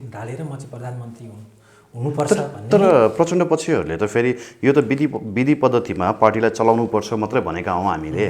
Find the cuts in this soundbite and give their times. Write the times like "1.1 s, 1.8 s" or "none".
none